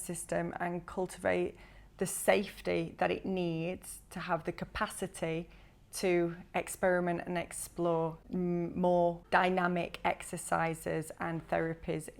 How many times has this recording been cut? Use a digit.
2